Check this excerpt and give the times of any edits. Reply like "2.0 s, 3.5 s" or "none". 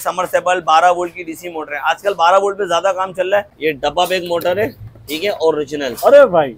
3.5 s